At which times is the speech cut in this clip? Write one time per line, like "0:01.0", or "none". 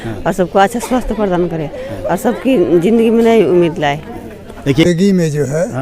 0:04.8